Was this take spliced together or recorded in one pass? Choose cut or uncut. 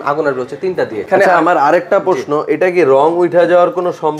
cut